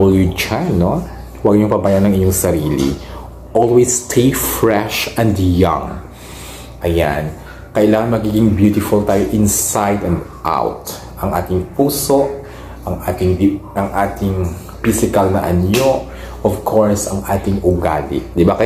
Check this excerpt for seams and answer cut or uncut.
uncut